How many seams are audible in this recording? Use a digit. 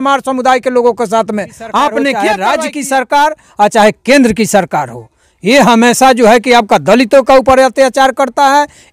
1